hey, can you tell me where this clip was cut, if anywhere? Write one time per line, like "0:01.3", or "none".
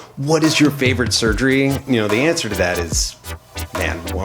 0:01.8